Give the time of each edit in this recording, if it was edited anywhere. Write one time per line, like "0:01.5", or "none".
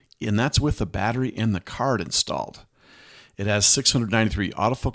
none